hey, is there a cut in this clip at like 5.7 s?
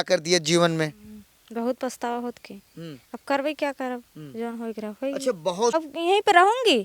yes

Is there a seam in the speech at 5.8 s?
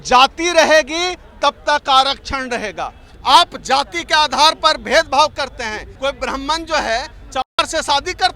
yes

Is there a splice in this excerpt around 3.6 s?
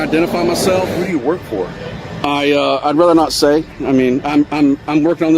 no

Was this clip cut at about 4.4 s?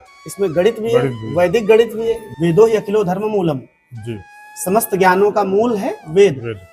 no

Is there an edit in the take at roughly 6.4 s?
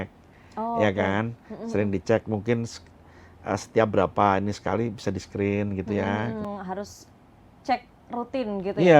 yes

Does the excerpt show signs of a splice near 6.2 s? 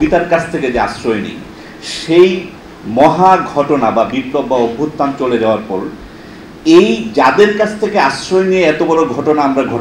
no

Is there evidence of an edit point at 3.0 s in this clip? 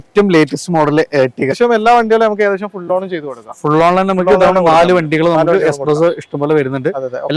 no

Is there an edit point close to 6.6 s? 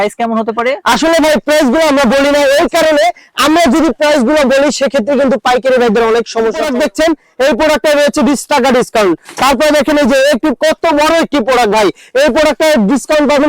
yes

